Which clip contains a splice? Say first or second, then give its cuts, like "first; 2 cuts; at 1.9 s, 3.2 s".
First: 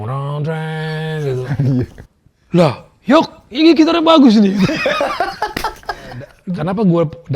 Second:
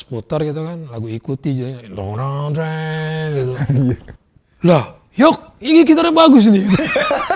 first; 1 cut; at 6.2 s